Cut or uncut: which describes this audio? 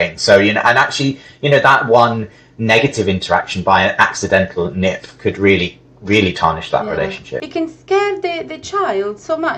cut